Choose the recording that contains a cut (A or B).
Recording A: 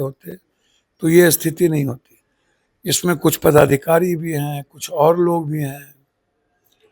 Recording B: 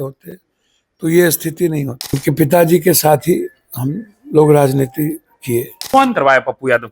B